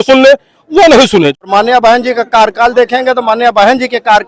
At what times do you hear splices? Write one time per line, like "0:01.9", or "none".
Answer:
0:01.5